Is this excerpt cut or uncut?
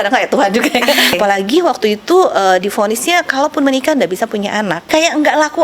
cut